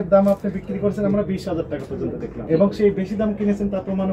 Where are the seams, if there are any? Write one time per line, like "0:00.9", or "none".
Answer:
0:02.4